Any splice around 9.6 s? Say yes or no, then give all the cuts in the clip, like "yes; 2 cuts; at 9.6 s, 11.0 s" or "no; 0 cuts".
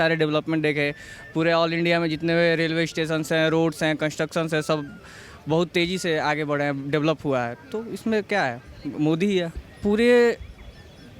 yes; 1 cut; at 9.6 s